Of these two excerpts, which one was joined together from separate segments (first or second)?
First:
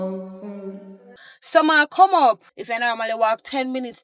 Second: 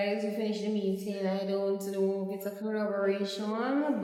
first